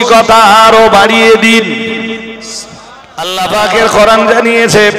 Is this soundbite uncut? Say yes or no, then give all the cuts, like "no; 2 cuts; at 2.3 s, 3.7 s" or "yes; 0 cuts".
no; 1 cut; at 3.3 s